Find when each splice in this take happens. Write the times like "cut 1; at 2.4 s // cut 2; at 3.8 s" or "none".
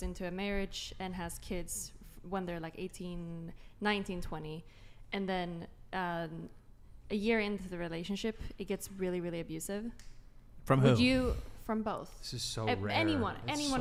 none